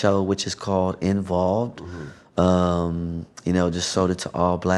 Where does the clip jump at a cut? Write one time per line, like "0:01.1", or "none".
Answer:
none